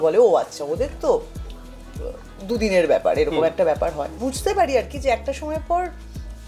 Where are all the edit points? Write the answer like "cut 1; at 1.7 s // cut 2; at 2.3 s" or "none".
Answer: cut 1; at 4.1 s